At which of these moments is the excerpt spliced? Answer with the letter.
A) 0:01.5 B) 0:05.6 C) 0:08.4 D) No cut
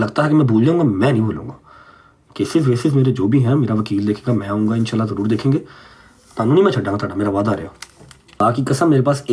C